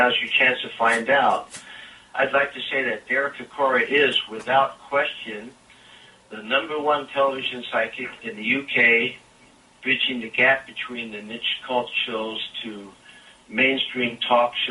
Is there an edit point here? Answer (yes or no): no